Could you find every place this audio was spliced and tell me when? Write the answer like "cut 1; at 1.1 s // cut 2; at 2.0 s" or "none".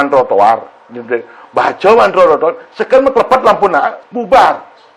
cut 1; at 4.0 s